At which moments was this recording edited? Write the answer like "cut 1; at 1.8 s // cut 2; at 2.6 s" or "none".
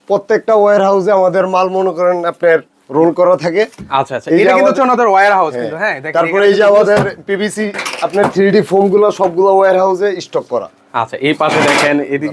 none